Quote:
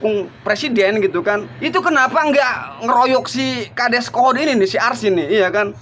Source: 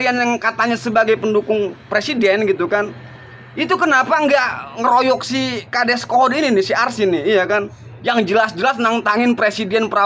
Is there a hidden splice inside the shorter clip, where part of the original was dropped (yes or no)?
yes